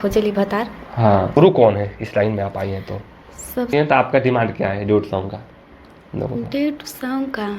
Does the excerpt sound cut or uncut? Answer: cut